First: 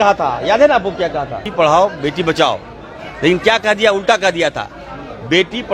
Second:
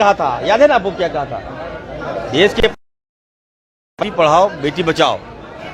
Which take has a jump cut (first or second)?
first